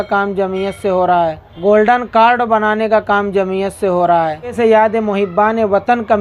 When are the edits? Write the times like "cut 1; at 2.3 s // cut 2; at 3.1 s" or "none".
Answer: cut 1; at 1.5 s // cut 2; at 4.5 s